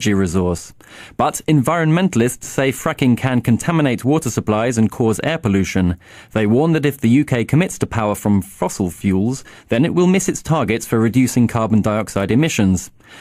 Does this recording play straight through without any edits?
yes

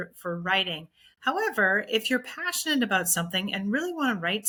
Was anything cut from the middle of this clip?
no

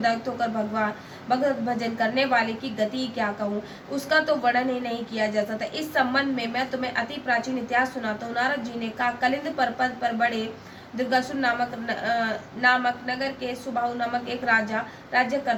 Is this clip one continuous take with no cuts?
yes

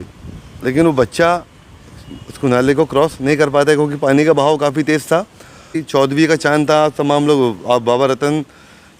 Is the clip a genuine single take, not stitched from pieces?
no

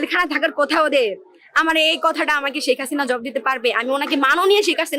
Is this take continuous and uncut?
yes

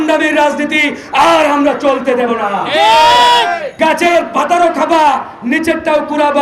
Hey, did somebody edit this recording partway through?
yes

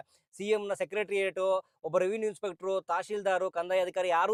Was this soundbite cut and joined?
no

